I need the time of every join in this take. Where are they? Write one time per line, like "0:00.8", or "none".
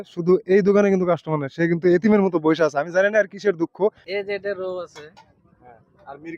0:04.1